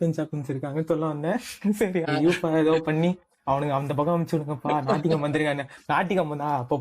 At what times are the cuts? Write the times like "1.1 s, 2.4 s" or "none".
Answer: 2.1 s